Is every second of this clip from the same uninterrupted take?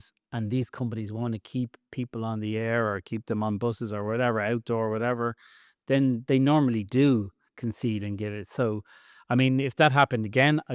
yes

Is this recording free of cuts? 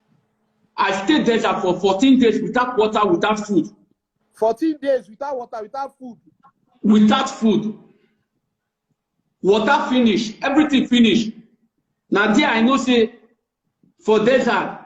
yes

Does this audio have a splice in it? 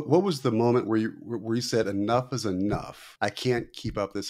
yes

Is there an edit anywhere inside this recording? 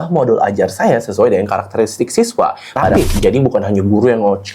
yes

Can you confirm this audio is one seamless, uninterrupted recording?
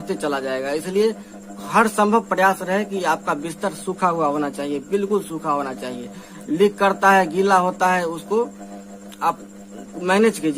yes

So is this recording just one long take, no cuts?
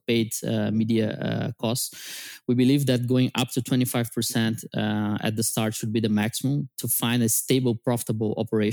yes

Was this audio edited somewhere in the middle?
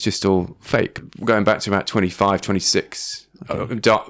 yes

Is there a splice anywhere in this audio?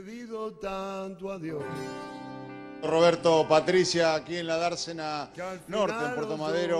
no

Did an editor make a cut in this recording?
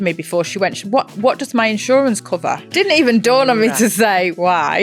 yes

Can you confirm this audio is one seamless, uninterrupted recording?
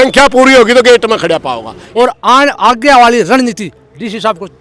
no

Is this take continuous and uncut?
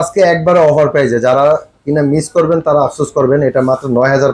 yes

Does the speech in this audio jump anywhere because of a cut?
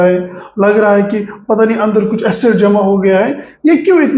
no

